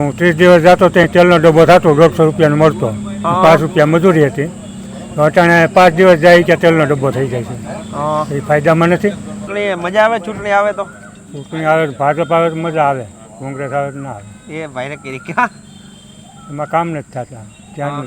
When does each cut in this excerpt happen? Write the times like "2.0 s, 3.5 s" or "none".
9.3 s